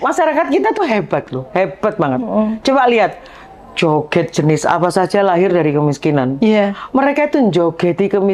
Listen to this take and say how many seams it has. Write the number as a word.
zero